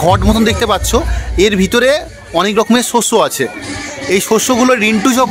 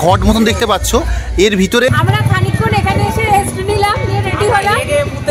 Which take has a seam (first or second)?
second